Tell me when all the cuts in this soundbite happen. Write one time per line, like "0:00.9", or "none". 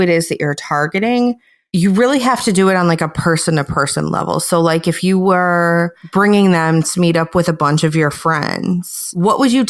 0:01.5